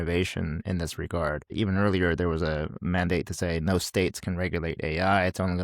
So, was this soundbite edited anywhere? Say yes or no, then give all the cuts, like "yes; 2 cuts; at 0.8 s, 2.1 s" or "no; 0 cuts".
yes; 1 cut; at 1.5 s